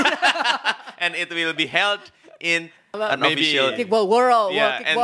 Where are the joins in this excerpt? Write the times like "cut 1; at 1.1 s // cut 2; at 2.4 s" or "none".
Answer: cut 1; at 3.7 s